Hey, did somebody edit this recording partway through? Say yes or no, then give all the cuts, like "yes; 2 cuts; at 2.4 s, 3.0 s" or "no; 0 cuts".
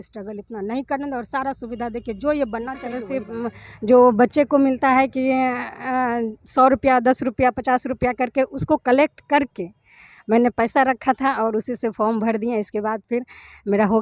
yes; 1 cut; at 3.3 s